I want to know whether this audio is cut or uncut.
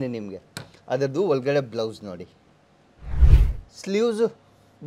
cut